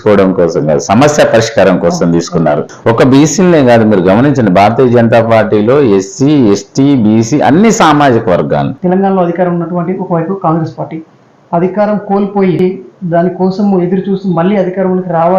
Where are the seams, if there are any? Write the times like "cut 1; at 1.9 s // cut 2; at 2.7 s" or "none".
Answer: cut 1; at 2.7 s // cut 2; at 8.7 s // cut 3; at 12.6 s